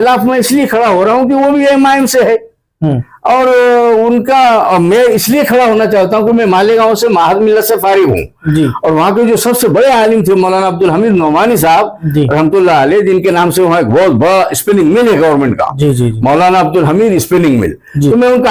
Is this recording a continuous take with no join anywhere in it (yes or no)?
yes